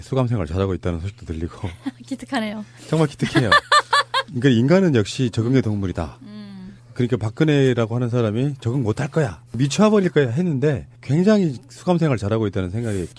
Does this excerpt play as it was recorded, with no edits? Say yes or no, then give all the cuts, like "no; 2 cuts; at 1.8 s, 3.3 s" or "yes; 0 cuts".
yes; 0 cuts